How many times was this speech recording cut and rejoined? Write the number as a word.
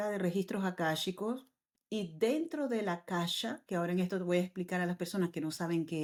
zero